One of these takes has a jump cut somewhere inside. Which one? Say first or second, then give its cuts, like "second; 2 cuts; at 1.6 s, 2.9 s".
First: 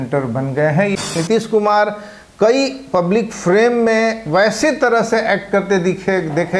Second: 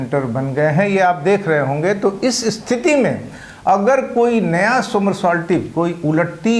first; 1 cut; at 1.0 s